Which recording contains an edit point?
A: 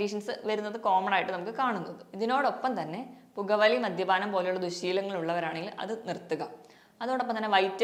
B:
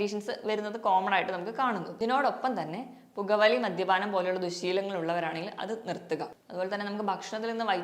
B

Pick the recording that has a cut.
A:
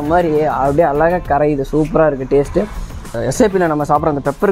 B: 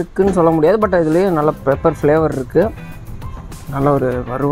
A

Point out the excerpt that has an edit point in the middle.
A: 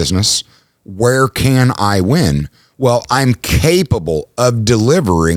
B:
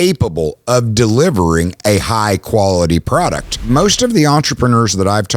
B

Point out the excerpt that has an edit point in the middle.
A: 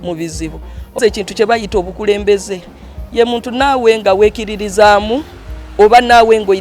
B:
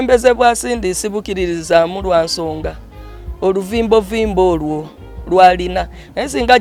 A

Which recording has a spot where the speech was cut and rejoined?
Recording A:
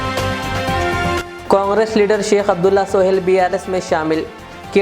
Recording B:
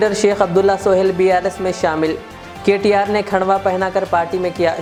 A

